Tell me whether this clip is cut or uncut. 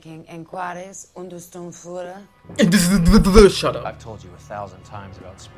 uncut